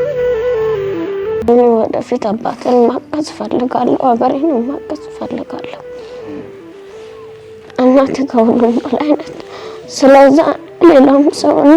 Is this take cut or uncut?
cut